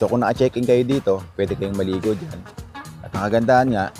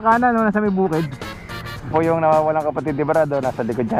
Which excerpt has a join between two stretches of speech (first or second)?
second